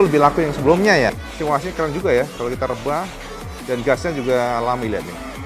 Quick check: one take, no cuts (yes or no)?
no